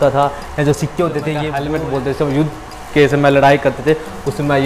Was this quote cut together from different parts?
yes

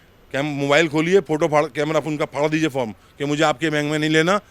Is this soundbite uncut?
yes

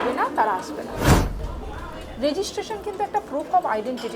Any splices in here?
yes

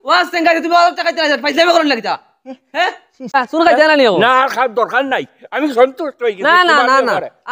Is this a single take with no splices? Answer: no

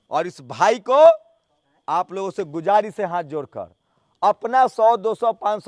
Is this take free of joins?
yes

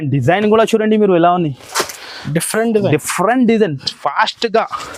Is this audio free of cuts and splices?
yes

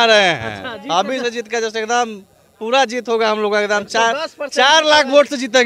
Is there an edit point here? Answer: no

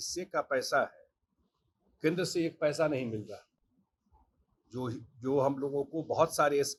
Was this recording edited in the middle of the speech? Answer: no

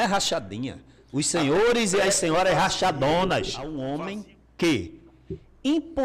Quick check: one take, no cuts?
no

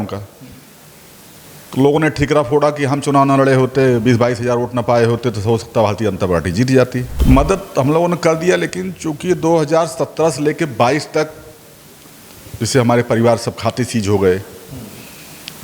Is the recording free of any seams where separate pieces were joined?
no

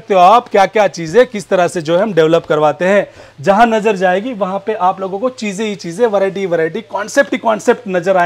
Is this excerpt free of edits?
yes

